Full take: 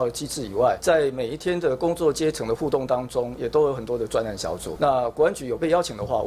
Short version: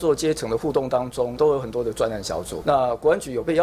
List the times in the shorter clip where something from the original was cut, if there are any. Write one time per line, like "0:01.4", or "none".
0:01.3